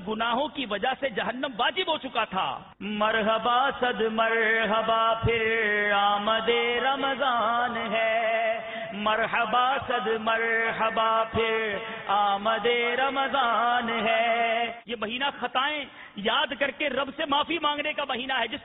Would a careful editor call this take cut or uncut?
cut